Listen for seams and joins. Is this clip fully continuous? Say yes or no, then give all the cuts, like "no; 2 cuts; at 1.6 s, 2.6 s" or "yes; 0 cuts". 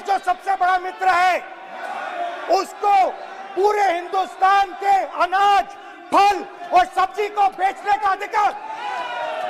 yes; 0 cuts